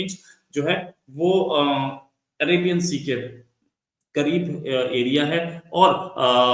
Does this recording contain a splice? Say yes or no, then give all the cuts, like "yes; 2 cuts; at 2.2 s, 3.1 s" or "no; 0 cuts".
no; 0 cuts